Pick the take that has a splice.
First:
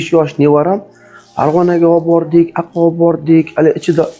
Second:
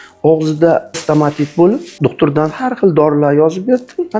second; 2 cuts; at 1.0 s, 1.9 s

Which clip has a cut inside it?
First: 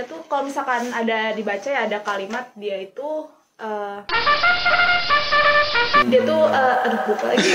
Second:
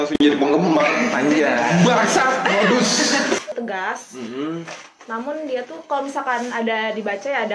second; 1 cut; at 3.6 s

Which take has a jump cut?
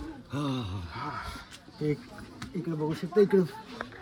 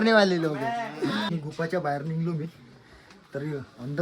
second; 1 cut; at 1.3 s

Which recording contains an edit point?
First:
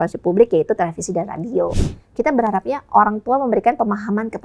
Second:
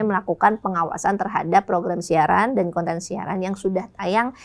first; 1 cut; at 1.7 s

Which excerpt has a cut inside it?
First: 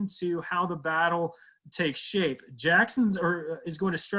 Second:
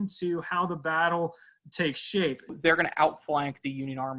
second; 1 cut; at 2.5 s

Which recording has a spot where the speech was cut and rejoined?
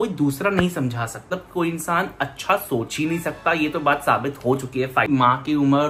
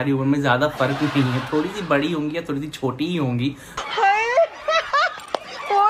first; 2 cuts; at 1.4 s, 5.1 s

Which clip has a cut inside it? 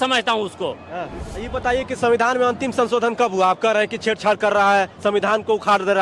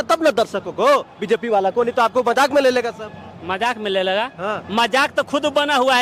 first; 1 cut; at 1.3 s

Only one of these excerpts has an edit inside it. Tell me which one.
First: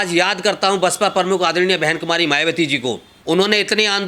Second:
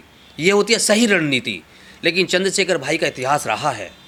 first; 1 cut; at 3.1 s

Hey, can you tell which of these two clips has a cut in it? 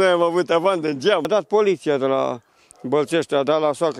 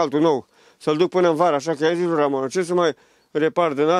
first; 1 cut; at 1.3 s

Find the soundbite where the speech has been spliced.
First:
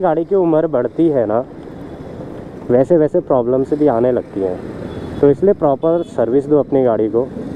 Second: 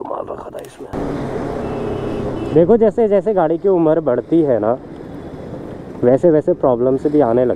second; 1 cut; at 0.9 s

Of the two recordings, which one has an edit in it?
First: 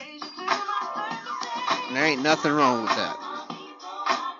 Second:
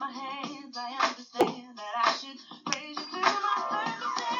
second; 1 cut; at 1.4 s

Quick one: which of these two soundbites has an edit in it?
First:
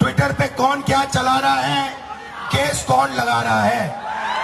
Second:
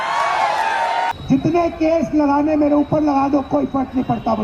second; 1 cut; at 1.1 s

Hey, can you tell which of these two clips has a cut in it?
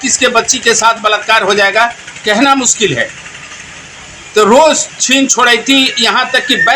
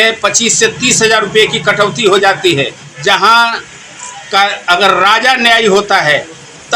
second; 1 cut; at 2.8 s

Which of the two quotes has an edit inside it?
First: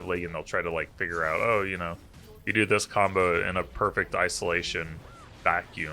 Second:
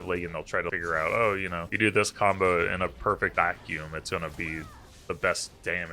second; 3 cuts; at 0.7 s, 1.6 s, 3.3 s

